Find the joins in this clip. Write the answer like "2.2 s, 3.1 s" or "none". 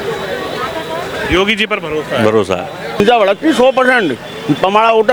3.0 s